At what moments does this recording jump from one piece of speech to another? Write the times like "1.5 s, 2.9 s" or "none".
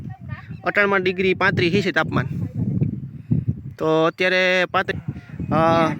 4.9 s